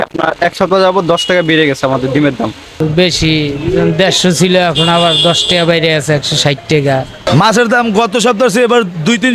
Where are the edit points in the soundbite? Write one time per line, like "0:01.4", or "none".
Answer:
0:02.6
0:07.1